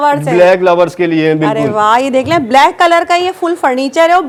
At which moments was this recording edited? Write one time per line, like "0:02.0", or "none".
none